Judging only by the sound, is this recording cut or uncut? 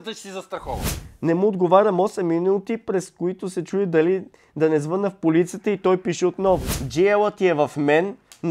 cut